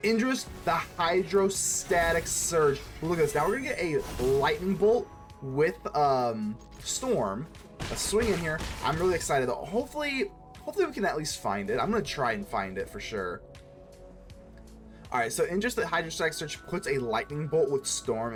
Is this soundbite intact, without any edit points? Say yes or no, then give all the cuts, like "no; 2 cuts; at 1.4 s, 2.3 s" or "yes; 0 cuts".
yes; 0 cuts